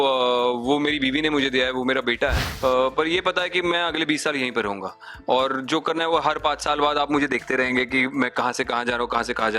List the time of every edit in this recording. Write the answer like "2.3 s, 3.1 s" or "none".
2.5 s